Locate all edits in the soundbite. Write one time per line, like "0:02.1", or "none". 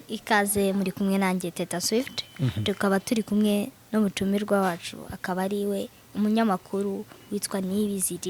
none